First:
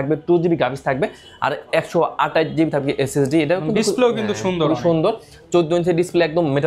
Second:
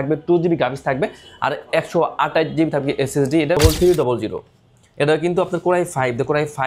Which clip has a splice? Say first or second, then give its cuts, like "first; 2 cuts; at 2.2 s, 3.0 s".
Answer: second; 1 cut; at 3.6 s